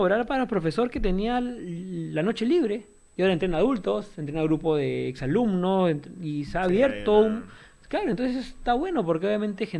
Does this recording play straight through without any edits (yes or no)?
yes